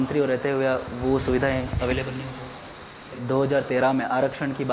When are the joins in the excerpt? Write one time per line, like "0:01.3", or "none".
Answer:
0:03.2